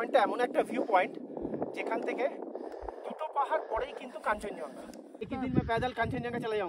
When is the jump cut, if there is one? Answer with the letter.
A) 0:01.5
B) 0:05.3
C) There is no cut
B